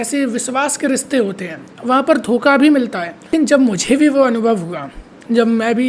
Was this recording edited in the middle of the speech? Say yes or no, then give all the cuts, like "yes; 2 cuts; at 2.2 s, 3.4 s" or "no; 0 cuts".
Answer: yes; 1 cut; at 3.3 s